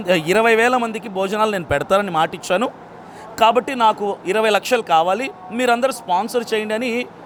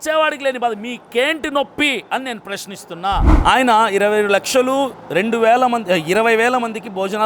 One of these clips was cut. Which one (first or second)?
second